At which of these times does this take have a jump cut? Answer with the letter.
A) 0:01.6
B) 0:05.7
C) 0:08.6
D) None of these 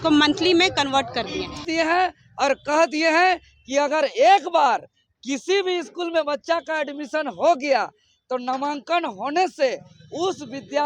A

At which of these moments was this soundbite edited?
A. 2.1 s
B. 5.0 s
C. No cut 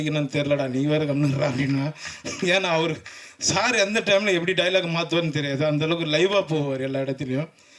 C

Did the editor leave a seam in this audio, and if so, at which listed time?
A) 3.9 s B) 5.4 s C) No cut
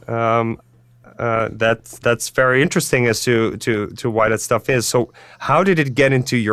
C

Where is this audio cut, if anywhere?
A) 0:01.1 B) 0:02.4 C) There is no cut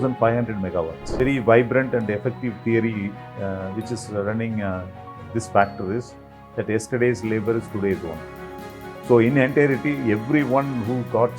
A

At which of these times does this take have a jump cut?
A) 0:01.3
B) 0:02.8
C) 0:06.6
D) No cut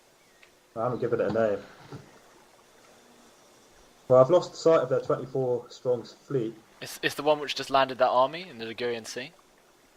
D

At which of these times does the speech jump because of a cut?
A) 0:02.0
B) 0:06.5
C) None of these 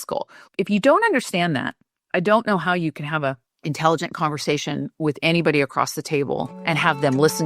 B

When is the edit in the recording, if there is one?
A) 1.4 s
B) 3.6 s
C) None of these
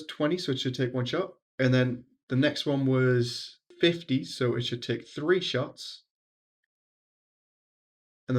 A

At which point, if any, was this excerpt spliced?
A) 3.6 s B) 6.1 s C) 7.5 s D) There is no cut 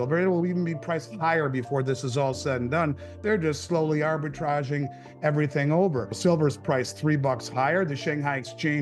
B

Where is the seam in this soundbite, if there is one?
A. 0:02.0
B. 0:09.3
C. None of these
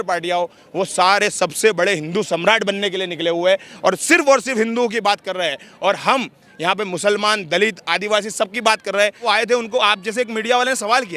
B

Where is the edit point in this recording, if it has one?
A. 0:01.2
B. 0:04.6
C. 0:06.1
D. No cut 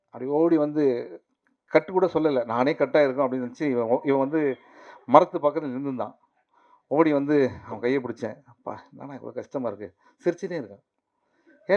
D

